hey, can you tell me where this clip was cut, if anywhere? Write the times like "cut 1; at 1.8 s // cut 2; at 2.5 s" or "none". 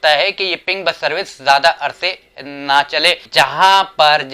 cut 1; at 3.2 s